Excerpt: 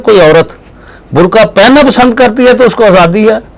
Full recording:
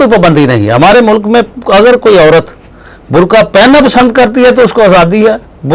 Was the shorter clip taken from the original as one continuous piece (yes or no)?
yes